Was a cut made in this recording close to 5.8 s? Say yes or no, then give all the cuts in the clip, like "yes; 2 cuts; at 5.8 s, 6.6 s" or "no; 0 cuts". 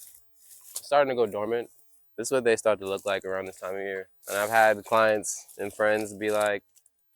no; 1 cut; at 4.1 s